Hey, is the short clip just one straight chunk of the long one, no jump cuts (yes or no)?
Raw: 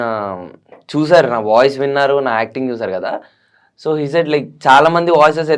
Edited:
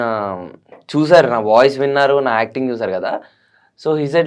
yes